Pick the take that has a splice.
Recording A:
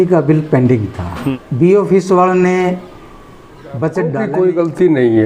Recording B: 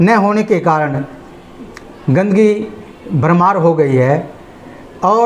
A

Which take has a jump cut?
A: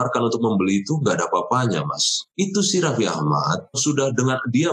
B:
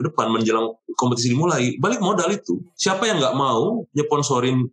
A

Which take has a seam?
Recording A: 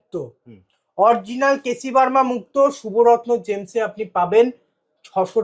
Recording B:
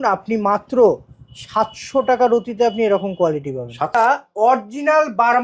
B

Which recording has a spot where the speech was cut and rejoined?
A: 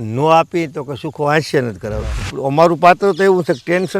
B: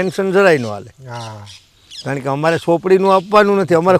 A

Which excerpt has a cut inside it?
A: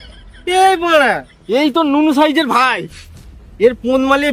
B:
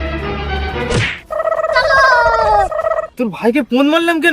B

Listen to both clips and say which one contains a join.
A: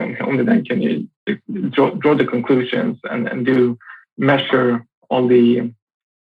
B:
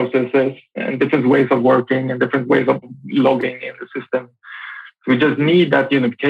B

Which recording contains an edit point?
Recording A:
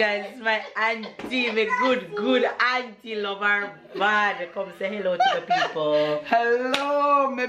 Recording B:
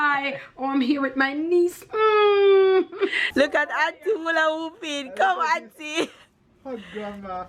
B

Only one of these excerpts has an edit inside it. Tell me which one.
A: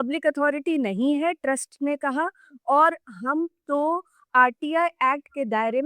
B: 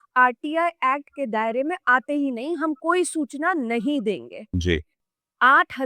B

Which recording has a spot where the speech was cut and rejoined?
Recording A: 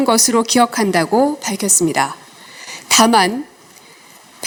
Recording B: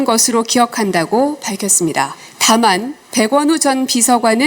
B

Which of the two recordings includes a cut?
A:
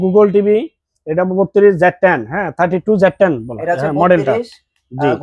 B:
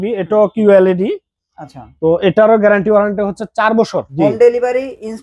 B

